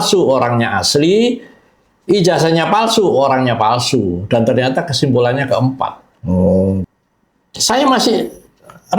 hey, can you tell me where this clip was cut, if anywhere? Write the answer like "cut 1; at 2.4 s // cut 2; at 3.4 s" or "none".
cut 1; at 6.9 s